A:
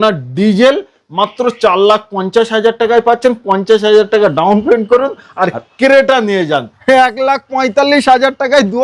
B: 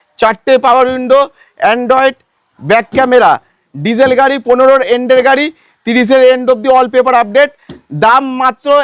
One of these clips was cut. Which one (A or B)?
A